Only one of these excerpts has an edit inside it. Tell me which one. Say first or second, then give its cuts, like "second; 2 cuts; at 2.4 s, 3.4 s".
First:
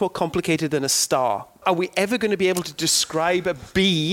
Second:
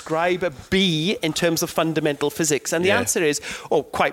first; 1 cut; at 1.6 s